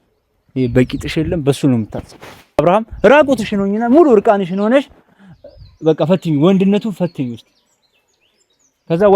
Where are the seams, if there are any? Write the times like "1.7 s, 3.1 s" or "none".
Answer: 2.6 s